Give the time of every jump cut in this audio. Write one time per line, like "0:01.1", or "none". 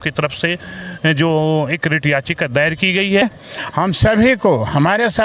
0:03.2